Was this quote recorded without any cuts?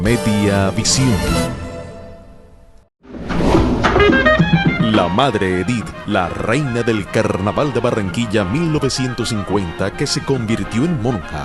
yes; 0 cuts

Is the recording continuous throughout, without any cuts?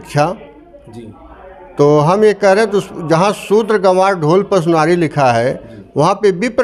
yes; 0 cuts

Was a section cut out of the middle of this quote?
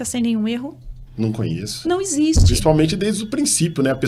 no; 0 cuts

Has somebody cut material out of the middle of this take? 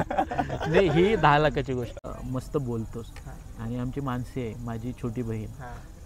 yes; 1 cut; at 2.1 s

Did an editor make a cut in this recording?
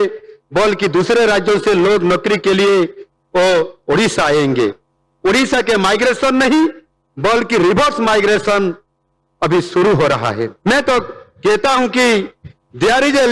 yes; 1 cut; at 10.5 s

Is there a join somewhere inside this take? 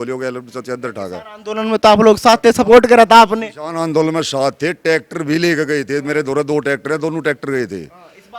no; 0 cuts

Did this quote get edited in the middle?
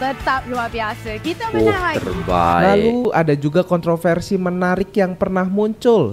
yes; 1 cut; at 3.1 s

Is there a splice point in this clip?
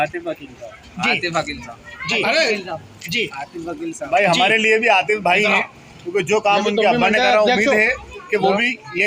no; 0 cuts

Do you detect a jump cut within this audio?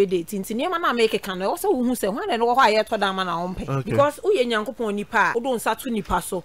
yes; 2 cuts; at 3.7 s, 5.3 s

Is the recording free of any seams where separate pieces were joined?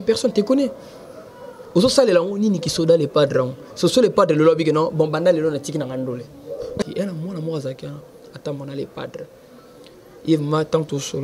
no; 1 cut; at 6.8 s

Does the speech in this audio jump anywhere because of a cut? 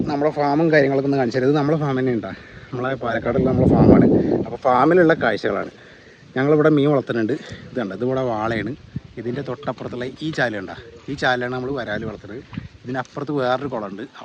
no; 0 cuts

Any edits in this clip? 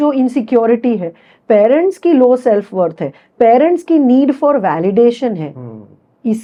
no; 0 cuts

